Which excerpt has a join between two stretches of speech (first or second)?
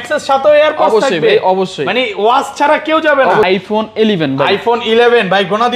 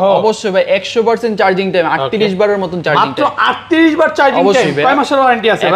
first